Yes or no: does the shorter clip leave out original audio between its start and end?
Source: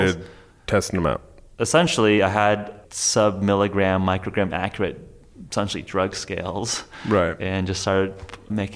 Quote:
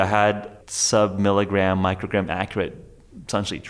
no